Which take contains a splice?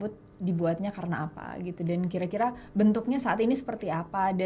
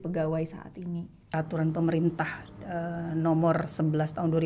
second; 1 cut; at 1.2 s

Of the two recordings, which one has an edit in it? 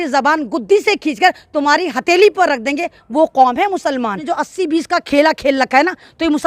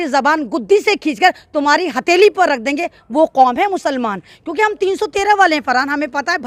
first; 1 cut; at 4.2 s

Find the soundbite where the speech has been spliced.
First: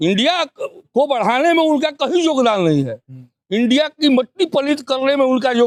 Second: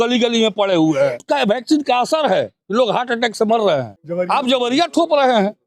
second; 2 cuts; at 1.2 s, 4.0 s

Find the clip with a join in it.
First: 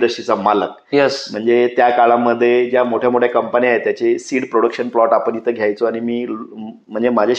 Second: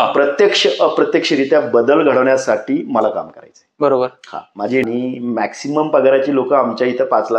second; 1 cut; at 4.8 s

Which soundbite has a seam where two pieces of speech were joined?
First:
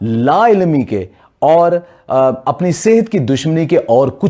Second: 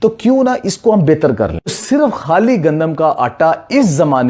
second; 1 cut; at 1.8 s

